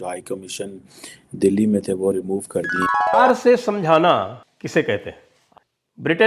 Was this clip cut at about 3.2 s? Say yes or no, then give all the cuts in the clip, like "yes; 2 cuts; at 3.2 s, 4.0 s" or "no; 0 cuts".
yes; 1 cut; at 3.2 s